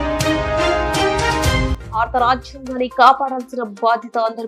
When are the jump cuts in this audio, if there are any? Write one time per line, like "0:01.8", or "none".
0:01.7